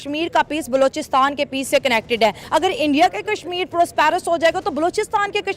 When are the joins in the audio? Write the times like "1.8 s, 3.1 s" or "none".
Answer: 2.4 s